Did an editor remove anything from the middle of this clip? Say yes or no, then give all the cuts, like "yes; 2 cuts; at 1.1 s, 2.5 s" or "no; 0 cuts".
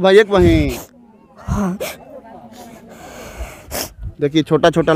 no; 0 cuts